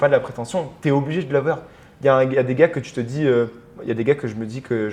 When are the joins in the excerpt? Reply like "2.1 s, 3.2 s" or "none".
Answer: none